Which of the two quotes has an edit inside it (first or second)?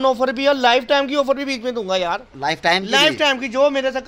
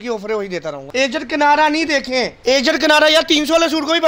second